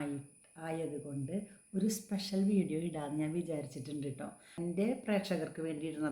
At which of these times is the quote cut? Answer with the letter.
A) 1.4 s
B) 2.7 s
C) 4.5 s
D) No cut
C